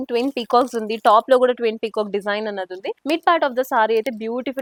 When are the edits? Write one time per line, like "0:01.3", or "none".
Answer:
none